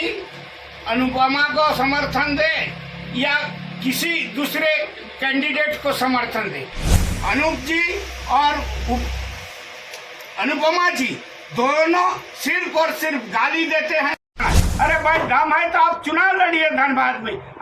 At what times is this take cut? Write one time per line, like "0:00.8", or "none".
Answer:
0:06.8
0:14.4